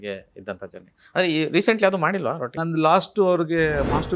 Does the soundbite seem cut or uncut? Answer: cut